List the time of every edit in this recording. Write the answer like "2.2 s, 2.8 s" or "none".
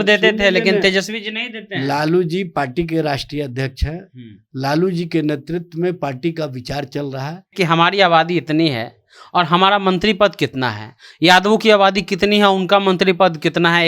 7.5 s